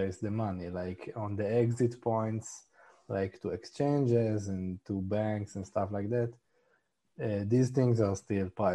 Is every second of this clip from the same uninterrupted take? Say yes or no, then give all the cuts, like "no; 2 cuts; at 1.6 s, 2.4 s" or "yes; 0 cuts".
yes; 0 cuts